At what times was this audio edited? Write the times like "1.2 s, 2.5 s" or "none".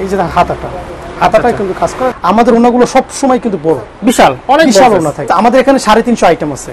2.1 s, 5.3 s